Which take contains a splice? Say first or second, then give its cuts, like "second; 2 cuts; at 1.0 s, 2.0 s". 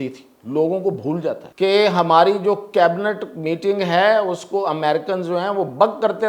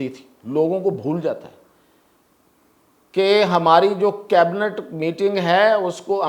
first; 1 cut; at 1.5 s